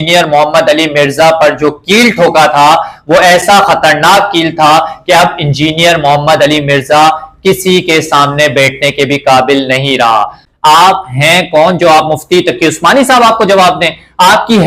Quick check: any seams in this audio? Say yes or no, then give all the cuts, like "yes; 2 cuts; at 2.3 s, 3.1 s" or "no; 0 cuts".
yes; 1 cut; at 10.4 s